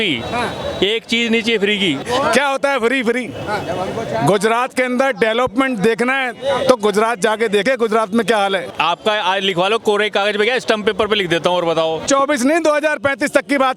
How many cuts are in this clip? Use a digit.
3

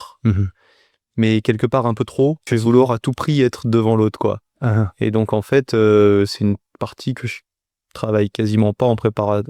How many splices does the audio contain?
1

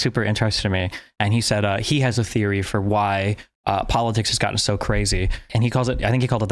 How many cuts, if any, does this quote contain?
1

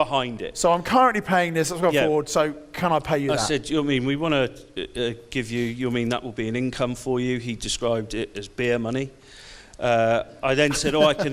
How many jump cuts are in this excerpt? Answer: 0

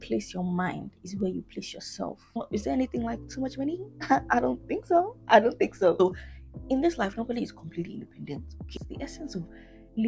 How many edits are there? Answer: 3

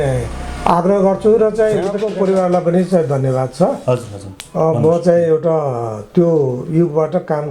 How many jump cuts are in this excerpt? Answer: 1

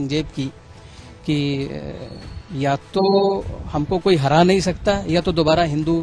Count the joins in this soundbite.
0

